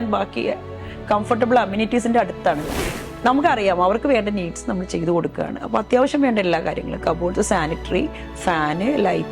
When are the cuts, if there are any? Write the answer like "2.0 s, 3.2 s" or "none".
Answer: 2.7 s